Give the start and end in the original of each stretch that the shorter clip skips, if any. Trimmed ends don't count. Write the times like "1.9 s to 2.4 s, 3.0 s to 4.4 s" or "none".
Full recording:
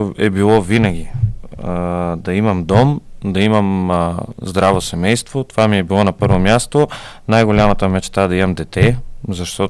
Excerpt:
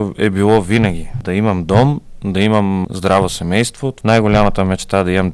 1.2 s to 2.2 s, 3.8 s to 4.4 s, 5.4 s to 7.1 s